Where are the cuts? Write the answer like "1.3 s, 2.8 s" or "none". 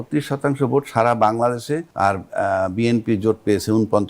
1.9 s